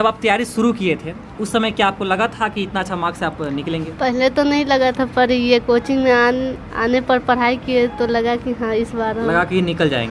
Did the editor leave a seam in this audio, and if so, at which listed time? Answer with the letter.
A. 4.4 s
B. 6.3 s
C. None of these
C